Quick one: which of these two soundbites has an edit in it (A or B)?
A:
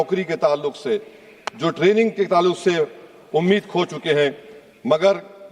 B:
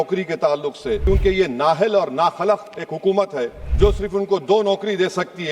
B